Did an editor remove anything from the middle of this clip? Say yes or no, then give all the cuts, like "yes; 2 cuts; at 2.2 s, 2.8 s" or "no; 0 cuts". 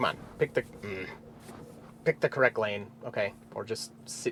no; 0 cuts